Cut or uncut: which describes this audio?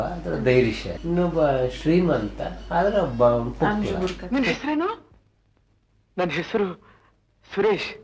cut